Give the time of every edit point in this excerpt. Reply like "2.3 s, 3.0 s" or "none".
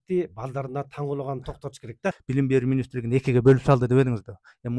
2.2 s